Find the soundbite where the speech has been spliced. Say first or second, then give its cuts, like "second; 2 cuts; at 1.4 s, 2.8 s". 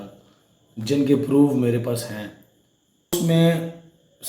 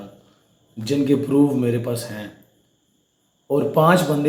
first; 1 cut; at 3.1 s